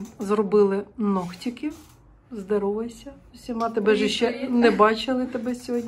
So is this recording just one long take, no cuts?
yes; 0 cuts

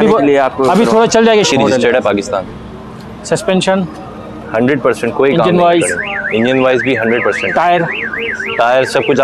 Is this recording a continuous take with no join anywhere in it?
no; 1 cut; at 1.5 s

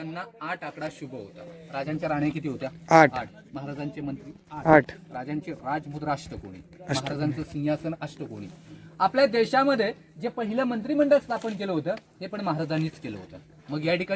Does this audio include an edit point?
no; 0 cuts

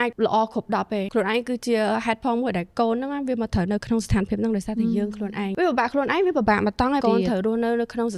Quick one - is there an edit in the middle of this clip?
yes; 3 cuts; at 1.1 s, 5.6 s, 7.0 s

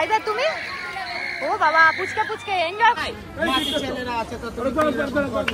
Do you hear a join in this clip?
yes; 1 cut; at 3.0 s

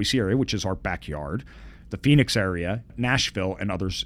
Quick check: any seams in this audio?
yes; 1 cut; at 2.9 s

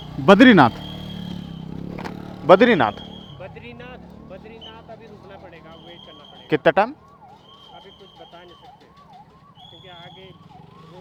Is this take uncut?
yes; 0 cuts

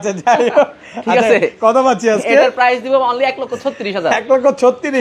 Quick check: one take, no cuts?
yes; 0 cuts

